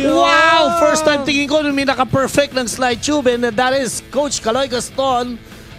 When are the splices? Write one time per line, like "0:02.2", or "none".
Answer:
none

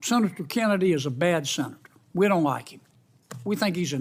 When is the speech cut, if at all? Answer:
none

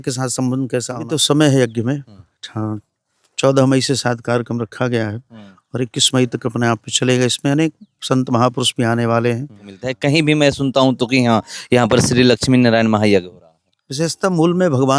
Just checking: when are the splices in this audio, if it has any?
0:00.9
0:09.9

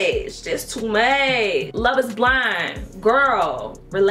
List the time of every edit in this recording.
0:01.7

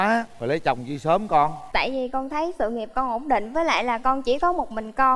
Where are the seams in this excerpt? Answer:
none

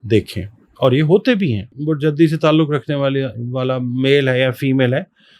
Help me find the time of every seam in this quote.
0:01.7

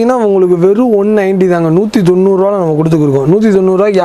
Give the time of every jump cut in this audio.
none

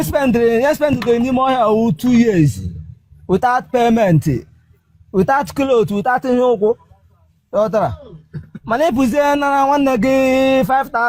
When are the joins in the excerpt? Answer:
none

